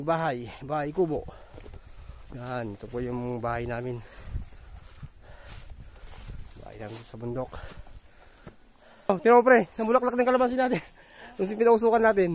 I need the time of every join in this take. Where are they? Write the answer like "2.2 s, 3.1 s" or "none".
9.1 s